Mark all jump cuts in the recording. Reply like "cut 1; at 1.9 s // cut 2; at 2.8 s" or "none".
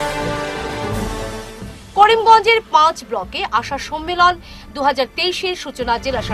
none